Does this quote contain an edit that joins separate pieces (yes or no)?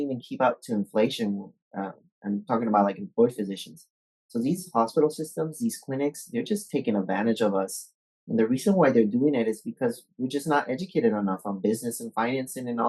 no